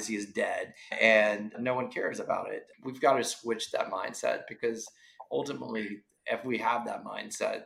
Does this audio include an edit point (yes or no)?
yes